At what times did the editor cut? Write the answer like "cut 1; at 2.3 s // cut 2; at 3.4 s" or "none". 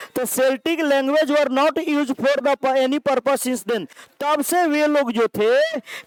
none